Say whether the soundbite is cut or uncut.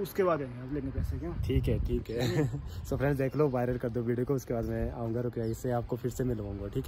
uncut